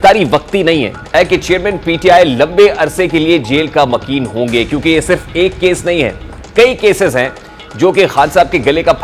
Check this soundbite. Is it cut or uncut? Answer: cut